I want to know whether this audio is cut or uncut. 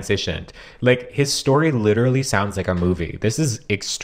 uncut